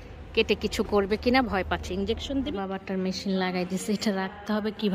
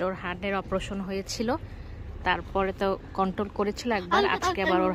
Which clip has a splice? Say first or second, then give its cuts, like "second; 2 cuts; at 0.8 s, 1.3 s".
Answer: first; 1 cut; at 2.5 s